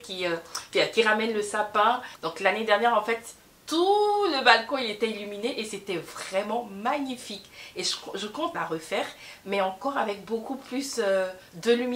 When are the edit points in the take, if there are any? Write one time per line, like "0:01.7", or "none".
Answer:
0:02.2
0:08.5

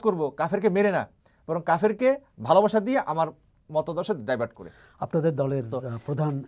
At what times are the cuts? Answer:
none

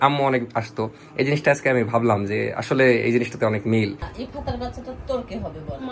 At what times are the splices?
0:04.0

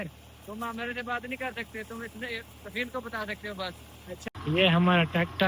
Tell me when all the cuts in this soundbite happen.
0:04.3

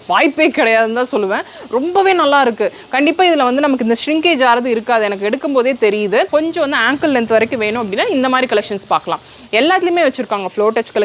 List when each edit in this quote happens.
0:06.3

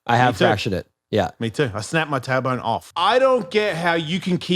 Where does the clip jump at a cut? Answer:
0:02.9

